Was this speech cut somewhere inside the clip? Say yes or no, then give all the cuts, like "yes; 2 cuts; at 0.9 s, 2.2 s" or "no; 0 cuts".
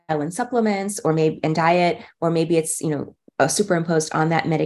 no; 0 cuts